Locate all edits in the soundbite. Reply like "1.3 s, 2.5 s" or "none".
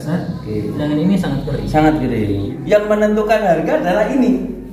2.5 s